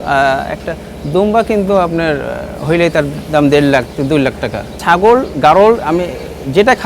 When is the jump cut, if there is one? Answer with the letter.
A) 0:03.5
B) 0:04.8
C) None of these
B